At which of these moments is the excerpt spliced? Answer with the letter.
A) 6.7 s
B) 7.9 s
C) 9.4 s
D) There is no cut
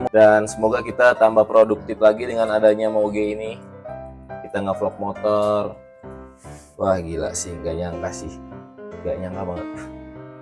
D